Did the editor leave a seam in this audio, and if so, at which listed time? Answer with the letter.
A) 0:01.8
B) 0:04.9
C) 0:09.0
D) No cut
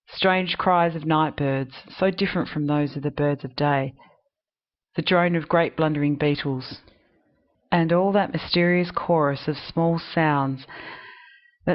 A